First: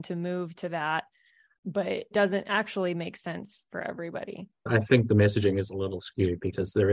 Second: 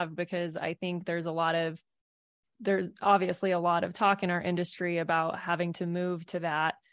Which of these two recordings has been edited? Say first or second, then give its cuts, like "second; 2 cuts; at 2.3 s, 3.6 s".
first; 1 cut; at 4.6 s